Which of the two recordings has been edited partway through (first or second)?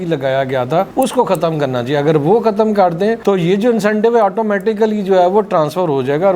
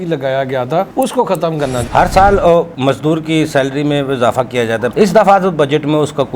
second